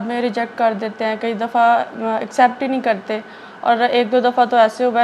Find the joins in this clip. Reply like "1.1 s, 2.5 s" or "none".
none